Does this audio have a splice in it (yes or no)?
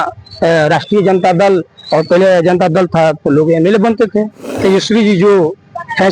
yes